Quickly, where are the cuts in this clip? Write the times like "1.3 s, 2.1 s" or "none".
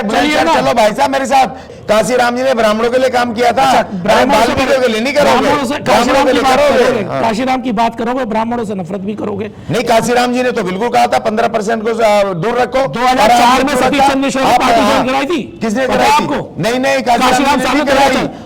1.7 s